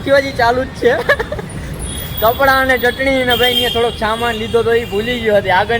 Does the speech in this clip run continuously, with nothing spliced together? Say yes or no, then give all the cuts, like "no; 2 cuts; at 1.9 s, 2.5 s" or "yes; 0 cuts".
yes; 0 cuts